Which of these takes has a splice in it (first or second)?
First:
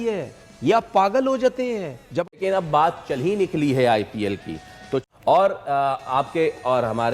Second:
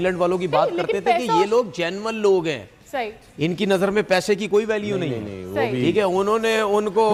first